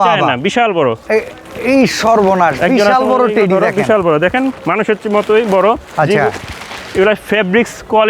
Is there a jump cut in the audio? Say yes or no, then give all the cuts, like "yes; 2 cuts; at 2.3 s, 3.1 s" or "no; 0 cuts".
no; 0 cuts